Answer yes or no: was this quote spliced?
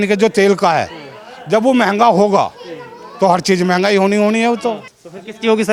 no